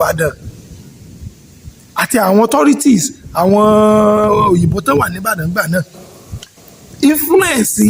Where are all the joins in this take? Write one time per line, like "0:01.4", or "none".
none